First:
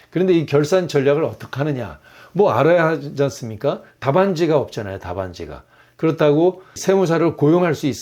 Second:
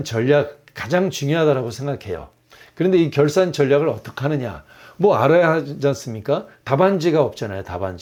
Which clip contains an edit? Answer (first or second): first